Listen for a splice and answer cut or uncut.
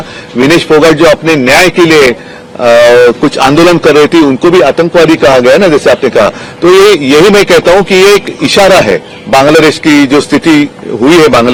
uncut